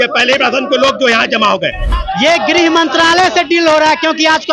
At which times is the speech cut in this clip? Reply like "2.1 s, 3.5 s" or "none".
1.9 s